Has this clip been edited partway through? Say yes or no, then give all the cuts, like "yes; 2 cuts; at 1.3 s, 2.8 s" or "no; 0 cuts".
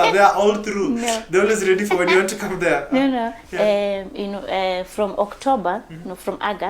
no; 0 cuts